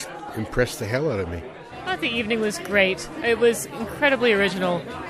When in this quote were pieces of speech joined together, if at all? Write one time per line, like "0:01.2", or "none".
0:01.5